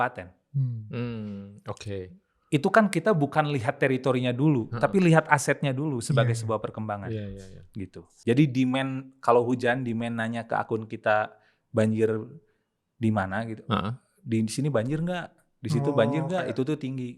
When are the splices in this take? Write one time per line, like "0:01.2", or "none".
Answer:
0:08.1

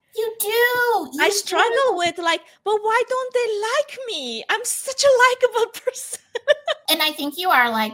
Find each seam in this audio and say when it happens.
0:06.9

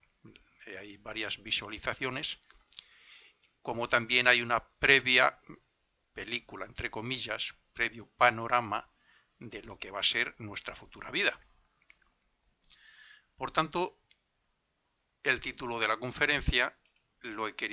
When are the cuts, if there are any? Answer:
0:09.8

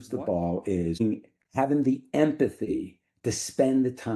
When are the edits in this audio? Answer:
0:01.0

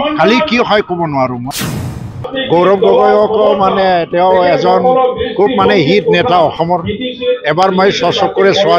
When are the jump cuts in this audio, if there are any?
0:01.8

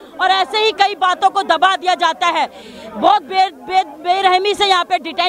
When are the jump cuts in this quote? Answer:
none

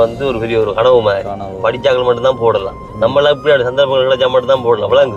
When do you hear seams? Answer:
none

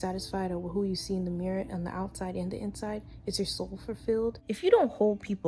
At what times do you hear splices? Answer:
0:04.4

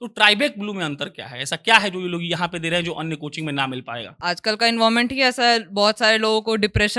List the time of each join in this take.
0:04.0

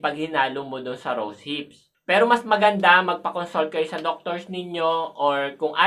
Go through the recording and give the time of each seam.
0:01.9

